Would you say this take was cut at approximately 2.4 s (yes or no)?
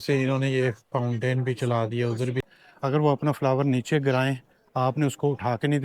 yes